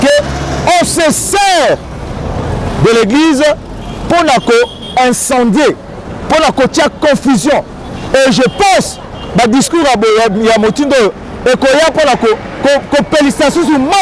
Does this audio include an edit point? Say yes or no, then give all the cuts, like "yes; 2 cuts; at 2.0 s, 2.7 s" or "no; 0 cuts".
no; 0 cuts